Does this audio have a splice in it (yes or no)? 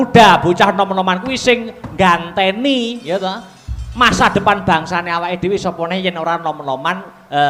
no